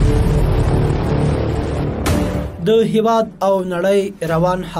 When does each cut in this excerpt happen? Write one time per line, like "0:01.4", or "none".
none